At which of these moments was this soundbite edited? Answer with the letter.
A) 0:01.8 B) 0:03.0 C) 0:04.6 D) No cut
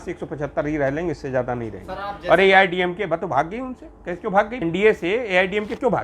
C